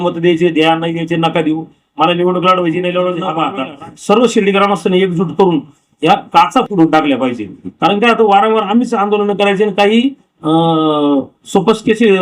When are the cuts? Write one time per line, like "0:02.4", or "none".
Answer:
0:03.3